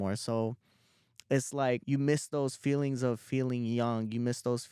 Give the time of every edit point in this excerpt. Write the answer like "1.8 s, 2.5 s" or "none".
1.8 s